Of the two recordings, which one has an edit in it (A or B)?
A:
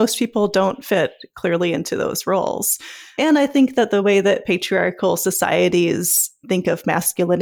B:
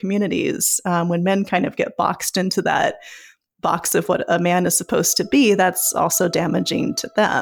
A